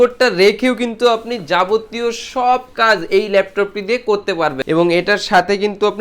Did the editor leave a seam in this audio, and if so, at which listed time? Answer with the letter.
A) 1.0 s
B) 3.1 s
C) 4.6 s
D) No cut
C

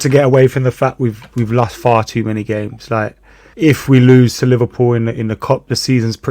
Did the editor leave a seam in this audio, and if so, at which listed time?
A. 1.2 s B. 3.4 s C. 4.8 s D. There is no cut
B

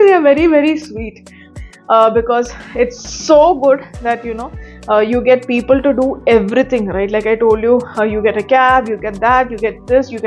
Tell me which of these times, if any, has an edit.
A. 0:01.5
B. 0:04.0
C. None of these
A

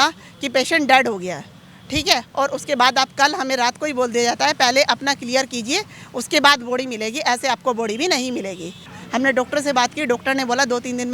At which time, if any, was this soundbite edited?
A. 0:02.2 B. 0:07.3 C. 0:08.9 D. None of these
C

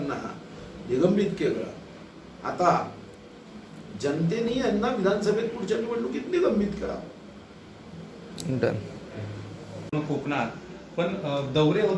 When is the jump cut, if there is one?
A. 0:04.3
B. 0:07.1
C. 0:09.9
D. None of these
C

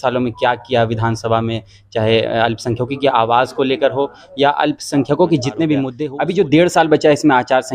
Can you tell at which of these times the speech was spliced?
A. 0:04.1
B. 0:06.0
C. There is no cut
B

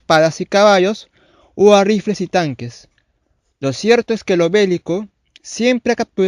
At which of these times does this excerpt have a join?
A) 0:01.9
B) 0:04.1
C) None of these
B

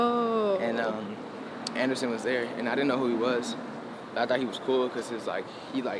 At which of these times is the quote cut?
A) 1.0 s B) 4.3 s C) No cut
C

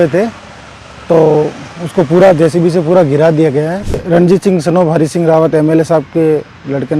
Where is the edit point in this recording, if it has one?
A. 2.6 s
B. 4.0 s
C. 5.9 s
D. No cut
B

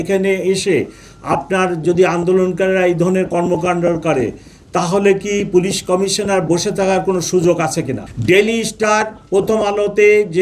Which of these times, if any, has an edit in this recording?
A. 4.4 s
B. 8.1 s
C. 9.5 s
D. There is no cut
B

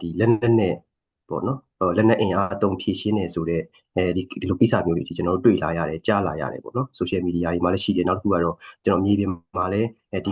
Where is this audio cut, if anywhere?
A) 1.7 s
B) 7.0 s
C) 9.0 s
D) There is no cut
D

